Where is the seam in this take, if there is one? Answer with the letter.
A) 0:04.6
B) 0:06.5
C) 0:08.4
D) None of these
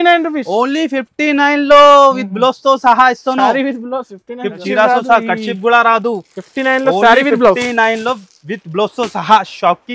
A